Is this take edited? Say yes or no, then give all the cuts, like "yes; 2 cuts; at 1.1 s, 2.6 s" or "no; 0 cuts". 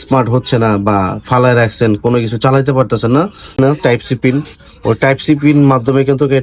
yes; 1 cut; at 3.5 s